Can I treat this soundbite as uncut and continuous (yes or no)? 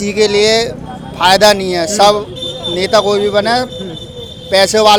yes